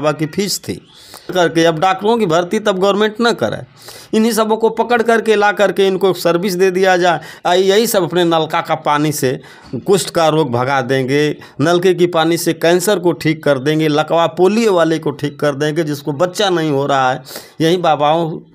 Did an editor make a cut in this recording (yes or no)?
yes